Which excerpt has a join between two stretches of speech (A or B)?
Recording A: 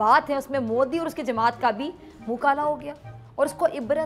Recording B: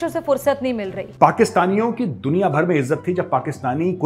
B